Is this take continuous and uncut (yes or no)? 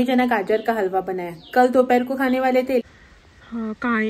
no